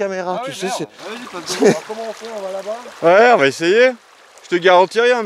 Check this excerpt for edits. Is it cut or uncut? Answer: cut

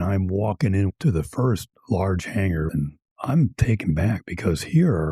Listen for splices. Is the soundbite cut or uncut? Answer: cut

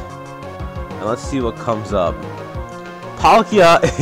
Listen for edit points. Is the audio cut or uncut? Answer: uncut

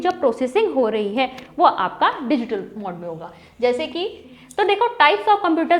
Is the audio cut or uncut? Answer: cut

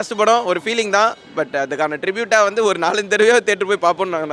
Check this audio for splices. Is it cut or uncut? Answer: uncut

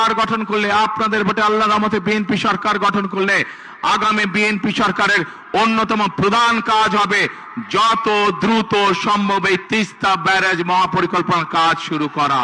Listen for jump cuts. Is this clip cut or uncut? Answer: uncut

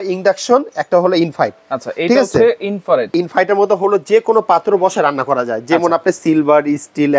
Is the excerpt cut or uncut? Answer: cut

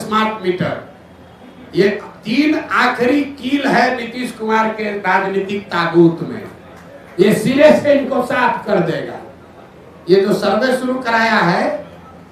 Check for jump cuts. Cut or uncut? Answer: uncut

